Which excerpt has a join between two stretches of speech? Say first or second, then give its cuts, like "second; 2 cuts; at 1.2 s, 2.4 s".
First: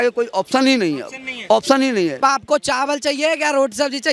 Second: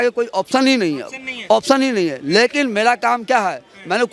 first; 1 cut; at 2.2 s